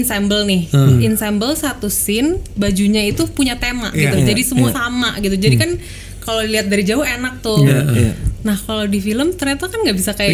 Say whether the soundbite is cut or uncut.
cut